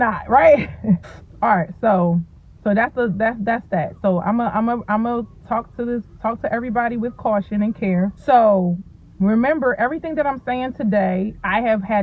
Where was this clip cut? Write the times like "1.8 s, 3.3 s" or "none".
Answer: none